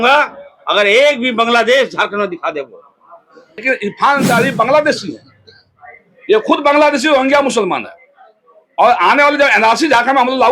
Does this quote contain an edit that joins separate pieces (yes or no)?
yes